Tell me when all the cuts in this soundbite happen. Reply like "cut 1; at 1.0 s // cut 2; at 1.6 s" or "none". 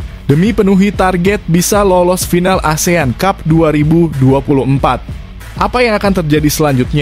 none